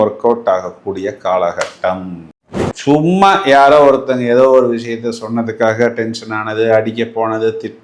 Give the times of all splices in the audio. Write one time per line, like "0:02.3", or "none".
0:02.2